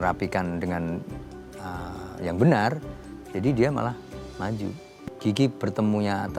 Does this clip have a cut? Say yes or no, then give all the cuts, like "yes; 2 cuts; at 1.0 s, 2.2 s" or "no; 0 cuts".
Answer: yes; 1 cut; at 4.9 s